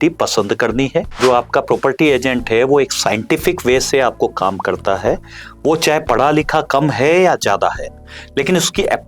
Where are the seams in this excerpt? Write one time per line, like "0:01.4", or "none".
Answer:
0:01.2